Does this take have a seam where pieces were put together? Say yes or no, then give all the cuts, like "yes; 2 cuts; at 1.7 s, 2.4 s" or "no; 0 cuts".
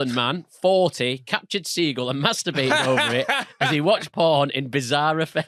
no; 0 cuts